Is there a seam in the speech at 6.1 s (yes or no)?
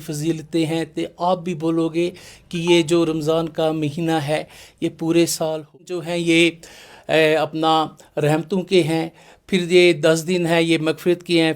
yes